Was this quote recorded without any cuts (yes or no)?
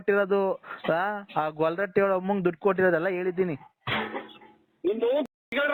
yes